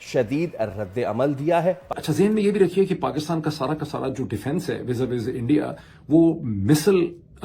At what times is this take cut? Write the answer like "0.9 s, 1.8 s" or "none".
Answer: 1.9 s